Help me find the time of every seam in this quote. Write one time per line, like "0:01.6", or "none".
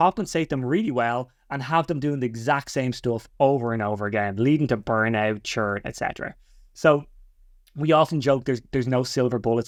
none